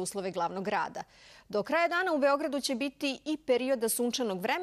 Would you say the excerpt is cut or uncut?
cut